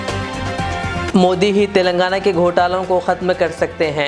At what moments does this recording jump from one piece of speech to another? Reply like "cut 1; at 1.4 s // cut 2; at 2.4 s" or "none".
cut 1; at 1.0 s